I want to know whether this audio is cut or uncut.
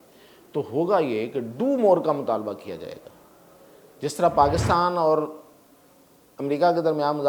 uncut